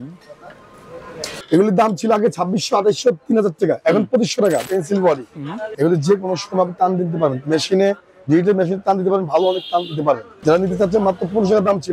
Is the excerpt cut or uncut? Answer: cut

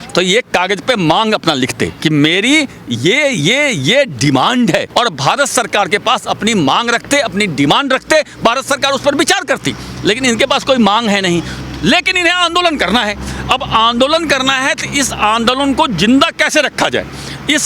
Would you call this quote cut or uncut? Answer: uncut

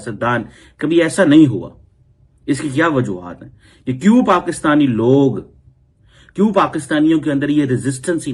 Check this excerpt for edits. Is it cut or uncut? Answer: uncut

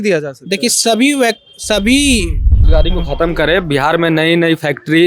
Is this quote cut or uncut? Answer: cut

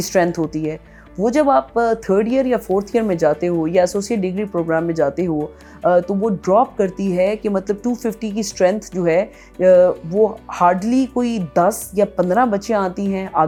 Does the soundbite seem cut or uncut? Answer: uncut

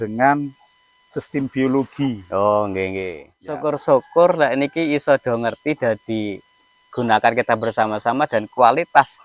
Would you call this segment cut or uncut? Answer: cut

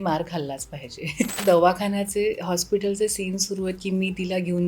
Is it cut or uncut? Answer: cut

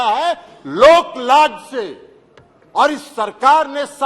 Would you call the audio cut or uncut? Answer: uncut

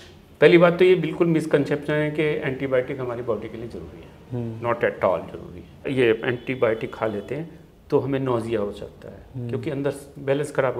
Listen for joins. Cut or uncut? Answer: cut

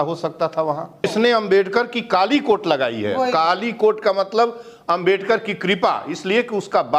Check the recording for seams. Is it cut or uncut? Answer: cut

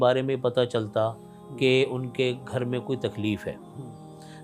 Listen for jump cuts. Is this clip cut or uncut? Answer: uncut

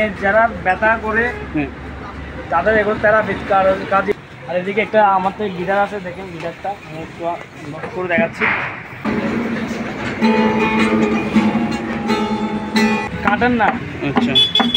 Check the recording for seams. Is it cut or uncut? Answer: cut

